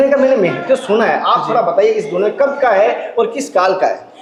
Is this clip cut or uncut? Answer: uncut